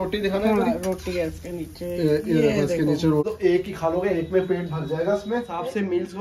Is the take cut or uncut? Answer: cut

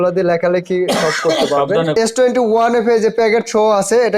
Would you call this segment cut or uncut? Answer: cut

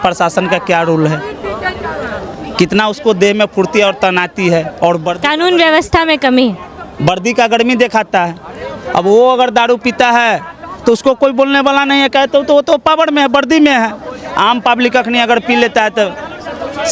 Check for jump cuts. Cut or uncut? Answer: uncut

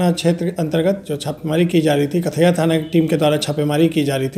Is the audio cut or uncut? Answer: uncut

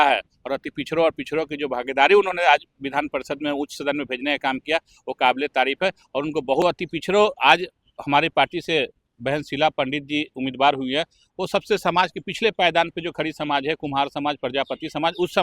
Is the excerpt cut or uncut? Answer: cut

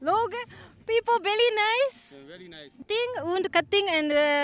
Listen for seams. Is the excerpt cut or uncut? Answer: cut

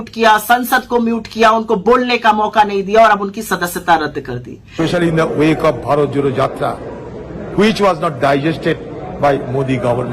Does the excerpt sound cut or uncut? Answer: cut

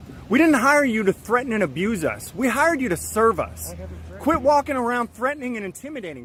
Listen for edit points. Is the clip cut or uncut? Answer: uncut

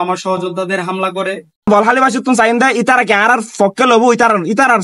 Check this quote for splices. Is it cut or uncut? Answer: cut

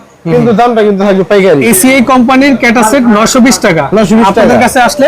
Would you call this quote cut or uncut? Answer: cut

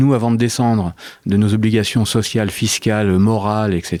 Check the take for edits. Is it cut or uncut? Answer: uncut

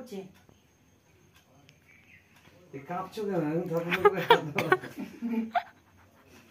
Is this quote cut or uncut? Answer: uncut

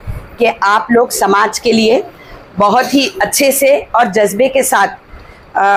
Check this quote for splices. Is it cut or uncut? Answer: uncut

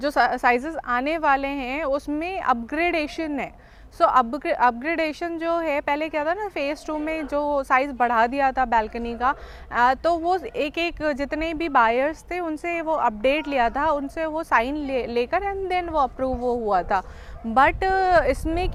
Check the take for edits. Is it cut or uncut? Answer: uncut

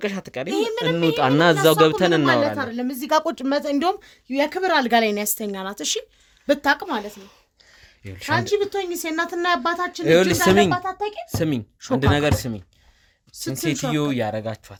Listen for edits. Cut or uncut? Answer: uncut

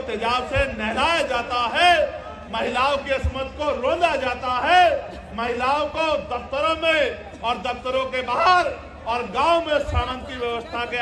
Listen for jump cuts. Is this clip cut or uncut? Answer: uncut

